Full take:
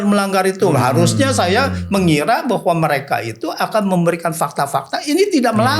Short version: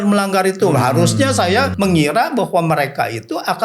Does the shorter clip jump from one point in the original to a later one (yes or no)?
yes